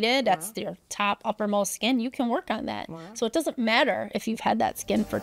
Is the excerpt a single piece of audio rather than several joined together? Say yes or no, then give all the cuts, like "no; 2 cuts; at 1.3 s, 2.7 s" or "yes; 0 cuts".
yes; 0 cuts